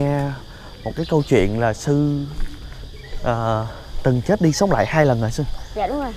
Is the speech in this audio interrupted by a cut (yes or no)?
no